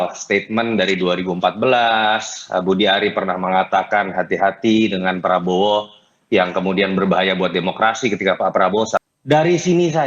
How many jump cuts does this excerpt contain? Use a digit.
1